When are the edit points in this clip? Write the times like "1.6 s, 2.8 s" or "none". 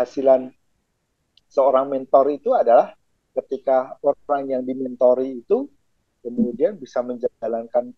none